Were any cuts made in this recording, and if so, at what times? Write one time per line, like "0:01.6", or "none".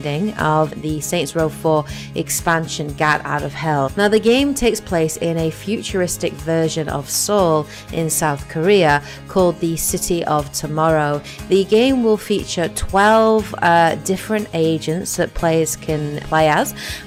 none